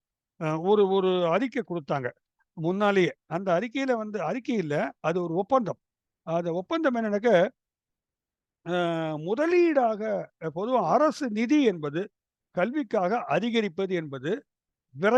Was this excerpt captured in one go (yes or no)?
yes